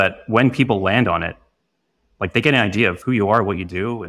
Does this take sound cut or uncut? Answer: cut